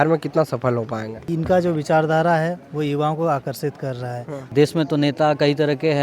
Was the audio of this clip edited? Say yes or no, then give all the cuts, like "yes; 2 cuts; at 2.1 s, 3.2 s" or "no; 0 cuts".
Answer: yes; 2 cuts; at 1.2 s, 4.5 s